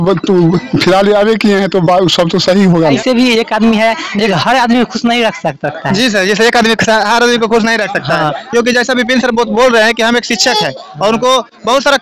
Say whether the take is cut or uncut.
cut